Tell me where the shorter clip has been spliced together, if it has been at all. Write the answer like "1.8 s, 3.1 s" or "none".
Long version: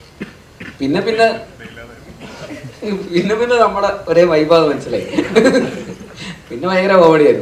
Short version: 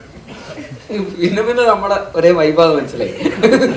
none